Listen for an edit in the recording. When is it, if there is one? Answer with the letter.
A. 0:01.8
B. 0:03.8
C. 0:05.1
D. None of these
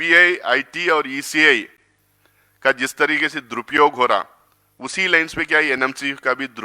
D